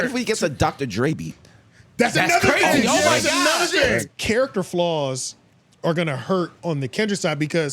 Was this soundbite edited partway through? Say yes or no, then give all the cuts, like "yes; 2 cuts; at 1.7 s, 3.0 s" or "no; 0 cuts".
yes; 1 cut; at 4.1 s